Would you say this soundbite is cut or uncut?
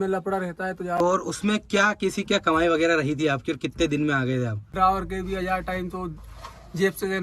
cut